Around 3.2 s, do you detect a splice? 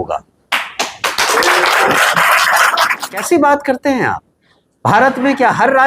yes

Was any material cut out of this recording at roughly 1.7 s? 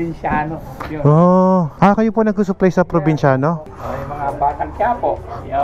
no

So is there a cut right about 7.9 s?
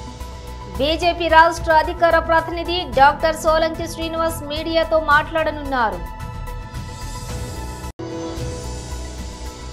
yes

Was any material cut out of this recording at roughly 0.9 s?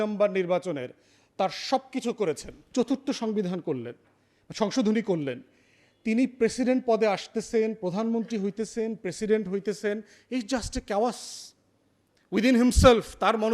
no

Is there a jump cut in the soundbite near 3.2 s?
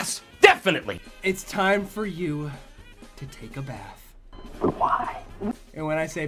no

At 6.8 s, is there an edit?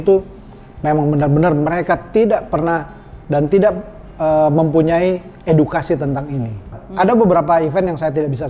yes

